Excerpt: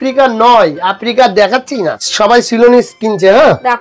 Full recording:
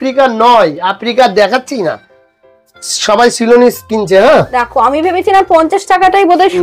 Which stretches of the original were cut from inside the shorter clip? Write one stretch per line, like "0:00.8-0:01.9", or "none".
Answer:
0:02.0-0:02.9